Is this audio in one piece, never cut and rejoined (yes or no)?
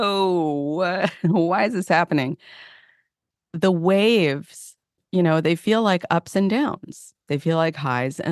no